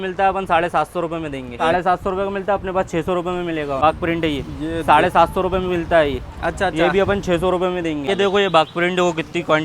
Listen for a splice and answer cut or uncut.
cut